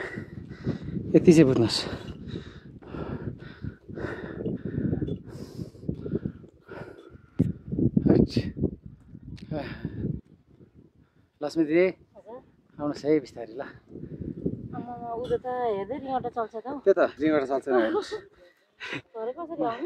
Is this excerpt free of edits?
yes; 0 cuts

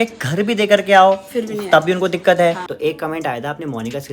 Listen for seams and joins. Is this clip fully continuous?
no; 1 cut; at 2.7 s

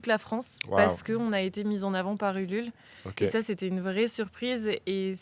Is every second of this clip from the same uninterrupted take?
yes; 0 cuts

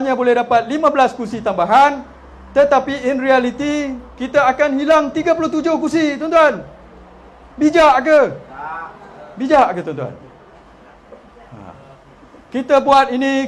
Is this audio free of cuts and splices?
yes; 0 cuts

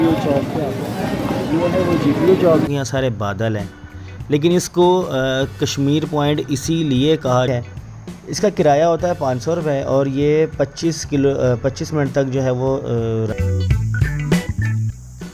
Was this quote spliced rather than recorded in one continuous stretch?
yes; 3 cuts; at 2.7 s, 7.5 s, 13.3 s

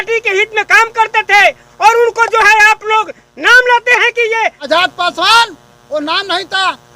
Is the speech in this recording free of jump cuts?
no; 1 cut; at 4.6 s

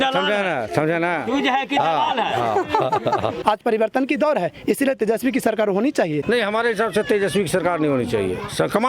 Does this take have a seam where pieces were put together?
yes; 2 cuts; at 3.4 s, 6.2 s

